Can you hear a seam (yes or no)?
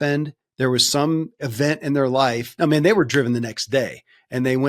yes